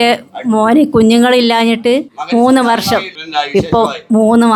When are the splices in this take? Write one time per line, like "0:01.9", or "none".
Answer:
0:02.1
0:03.1

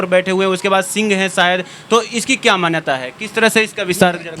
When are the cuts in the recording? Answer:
none

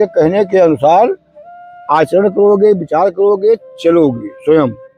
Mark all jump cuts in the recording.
none

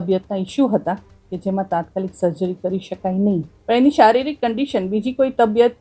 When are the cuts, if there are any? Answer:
0:03.5

